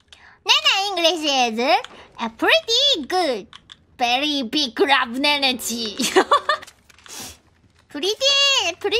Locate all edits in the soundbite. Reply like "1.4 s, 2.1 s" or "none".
6.6 s